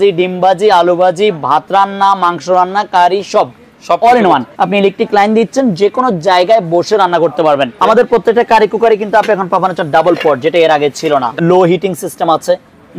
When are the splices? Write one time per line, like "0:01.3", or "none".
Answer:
0:04.5
0:07.7
0:11.3